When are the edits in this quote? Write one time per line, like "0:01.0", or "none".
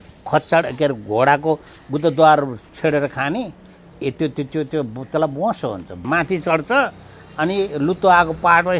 0:06.0